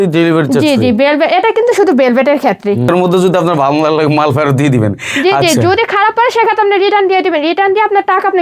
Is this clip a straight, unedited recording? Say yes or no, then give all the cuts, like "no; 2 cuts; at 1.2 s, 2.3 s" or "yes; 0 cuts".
no; 1 cut; at 2.9 s